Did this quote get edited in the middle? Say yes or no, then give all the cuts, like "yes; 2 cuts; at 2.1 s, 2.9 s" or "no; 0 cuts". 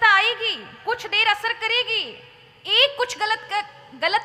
no; 0 cuts